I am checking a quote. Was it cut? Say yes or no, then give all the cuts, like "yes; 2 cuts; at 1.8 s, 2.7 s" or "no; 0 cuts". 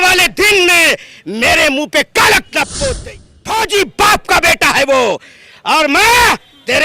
yes; 1 cut; at 3.0 s